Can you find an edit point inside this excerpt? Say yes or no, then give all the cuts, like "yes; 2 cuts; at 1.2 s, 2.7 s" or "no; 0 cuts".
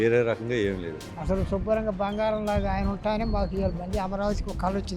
yes; 1 cut; at 1.1 s